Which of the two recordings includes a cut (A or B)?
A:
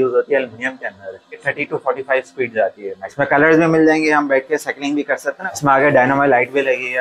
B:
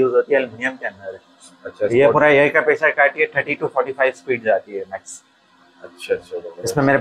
A